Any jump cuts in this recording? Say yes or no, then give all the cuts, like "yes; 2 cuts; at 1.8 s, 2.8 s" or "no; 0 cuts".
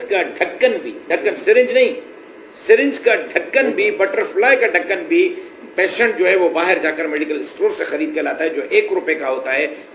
no; 0 cuts